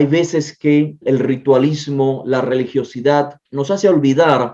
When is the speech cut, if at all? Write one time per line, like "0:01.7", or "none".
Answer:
0:01.0
0:03.4